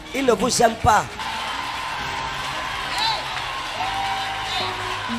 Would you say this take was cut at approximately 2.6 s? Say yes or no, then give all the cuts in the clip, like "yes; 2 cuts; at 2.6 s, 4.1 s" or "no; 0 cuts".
no; 1 cut; at 1.2 s